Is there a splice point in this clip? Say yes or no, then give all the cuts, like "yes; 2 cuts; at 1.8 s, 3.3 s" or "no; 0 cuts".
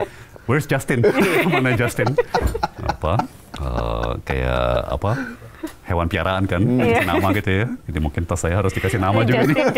no; 0 cuts